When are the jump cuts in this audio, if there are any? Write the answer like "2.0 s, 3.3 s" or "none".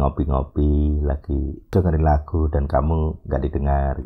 1.6 s